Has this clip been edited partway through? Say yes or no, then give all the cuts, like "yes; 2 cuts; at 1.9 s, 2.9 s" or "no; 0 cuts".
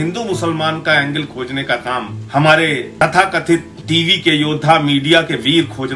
yes; 3 cuts; at 2.2 s, 2.9 s, 3.7 s